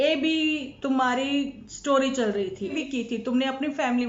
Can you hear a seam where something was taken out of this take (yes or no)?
yes